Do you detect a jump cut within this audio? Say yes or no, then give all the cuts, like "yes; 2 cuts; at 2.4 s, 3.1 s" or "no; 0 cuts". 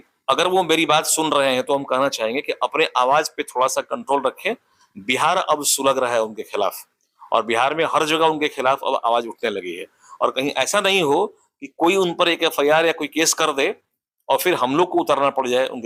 no; 0 cuts